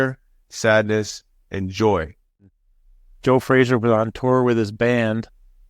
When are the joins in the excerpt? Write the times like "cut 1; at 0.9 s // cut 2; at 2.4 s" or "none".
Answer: cut 1; at 2.5 s